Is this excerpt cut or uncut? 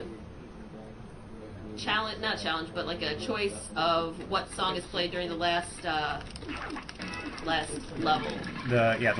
cut